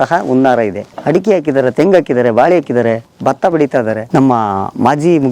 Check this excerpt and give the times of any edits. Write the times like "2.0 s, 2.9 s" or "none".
1.0 s, 4.0 s